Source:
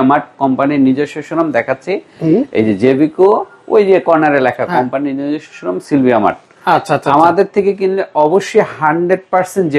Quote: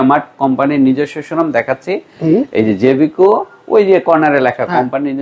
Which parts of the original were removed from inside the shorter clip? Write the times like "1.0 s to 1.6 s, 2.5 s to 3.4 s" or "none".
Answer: none